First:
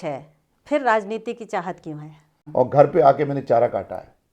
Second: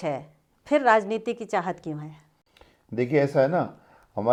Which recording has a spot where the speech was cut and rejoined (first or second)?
first